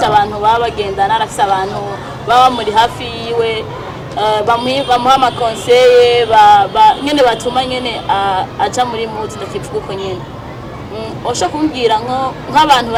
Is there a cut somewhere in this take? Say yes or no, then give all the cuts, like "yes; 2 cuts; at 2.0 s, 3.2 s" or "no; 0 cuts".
no; 0 cuts